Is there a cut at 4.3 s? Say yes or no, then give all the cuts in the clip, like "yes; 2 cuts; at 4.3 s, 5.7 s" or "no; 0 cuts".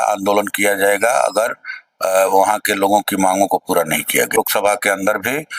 yes; 1 cut; at 4.3 s